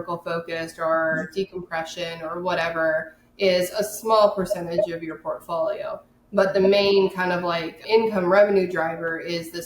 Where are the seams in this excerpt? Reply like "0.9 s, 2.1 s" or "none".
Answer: 7.7 s